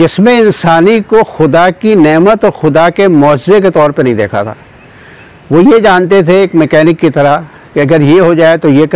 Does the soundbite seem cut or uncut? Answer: uncut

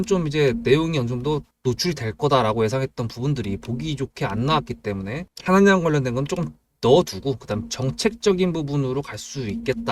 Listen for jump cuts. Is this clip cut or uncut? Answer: cut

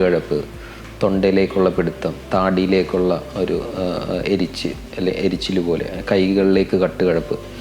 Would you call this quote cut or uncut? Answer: uncut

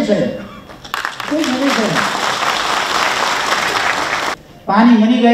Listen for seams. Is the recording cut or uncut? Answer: cut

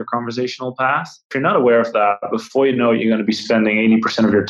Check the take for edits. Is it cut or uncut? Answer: cut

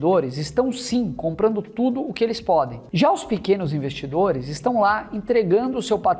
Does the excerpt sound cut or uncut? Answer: cut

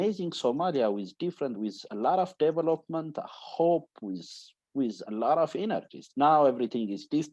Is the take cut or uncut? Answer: uncut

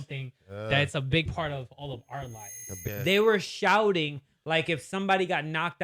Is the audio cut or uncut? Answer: cut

